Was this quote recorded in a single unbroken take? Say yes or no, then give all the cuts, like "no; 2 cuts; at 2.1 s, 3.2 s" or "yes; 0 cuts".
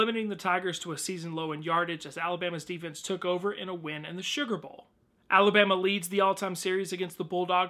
yes; 0 cuts